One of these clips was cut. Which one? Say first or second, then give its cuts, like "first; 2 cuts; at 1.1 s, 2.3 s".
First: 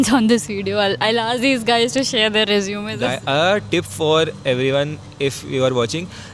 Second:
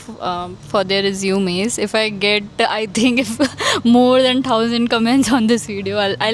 first; 1 cut; at 2.9 s